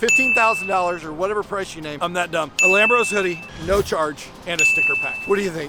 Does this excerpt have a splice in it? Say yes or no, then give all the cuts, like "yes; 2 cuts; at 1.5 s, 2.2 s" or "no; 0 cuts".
no; 0 cuts